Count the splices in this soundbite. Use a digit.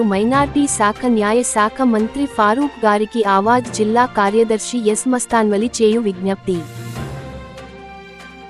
0